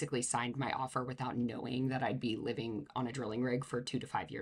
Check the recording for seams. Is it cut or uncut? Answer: uncut